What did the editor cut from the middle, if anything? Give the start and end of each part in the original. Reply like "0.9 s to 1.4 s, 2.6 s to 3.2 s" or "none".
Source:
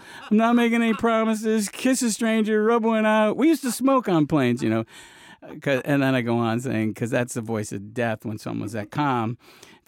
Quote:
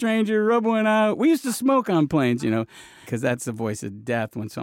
5.3 s to 7.0 s